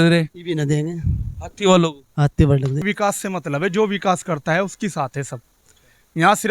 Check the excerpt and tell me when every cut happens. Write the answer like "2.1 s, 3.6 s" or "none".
2.8 s